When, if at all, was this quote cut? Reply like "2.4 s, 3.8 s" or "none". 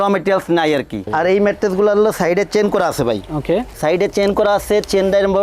1.1 s